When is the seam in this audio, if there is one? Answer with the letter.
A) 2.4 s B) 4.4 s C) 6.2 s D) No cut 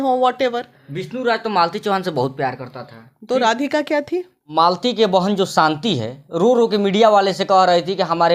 B